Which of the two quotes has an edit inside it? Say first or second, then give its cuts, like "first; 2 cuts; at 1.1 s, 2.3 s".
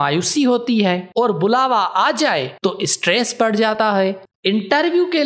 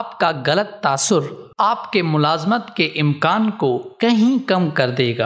first; 1 cut; at 3.8 s